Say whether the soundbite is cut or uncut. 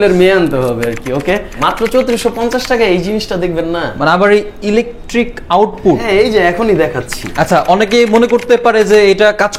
cut